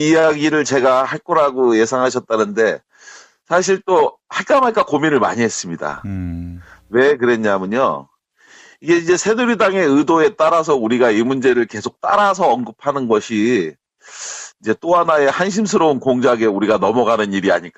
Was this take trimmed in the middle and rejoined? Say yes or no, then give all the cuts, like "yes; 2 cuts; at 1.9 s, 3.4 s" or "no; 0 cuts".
yes; 1 cut; at 7.9 s